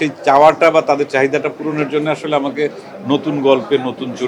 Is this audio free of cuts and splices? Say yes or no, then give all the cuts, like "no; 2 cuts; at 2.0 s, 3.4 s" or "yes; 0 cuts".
yes; 0 cuts